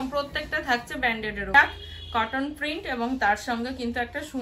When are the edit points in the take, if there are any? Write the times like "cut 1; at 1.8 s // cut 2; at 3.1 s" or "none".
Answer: cut 1; at 1.5 s